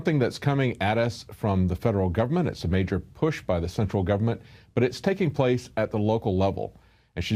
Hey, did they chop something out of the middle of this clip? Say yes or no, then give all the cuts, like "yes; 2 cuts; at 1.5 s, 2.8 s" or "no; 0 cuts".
no; 0 cuts